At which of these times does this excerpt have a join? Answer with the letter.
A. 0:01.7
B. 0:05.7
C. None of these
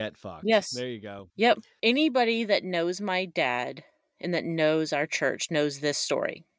A